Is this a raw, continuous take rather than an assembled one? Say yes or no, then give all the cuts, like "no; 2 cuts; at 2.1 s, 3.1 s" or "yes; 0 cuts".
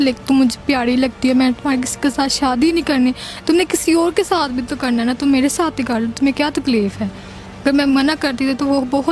yes; 0 cuts